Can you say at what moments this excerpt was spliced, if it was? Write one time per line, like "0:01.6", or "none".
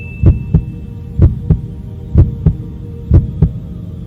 none